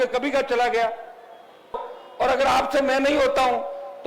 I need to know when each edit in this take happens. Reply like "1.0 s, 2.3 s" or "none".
1.9 s